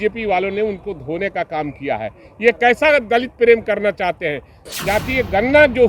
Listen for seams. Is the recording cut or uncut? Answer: cut